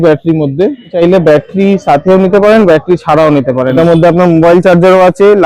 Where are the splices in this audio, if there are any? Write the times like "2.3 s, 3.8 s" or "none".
0.9 s, 3.8 s